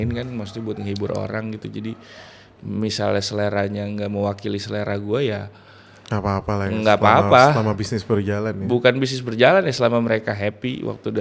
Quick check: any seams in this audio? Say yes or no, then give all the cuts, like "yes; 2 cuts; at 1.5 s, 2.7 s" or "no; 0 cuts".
no; 0 cuts